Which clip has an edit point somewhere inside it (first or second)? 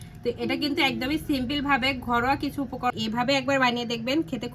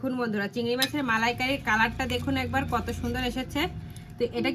first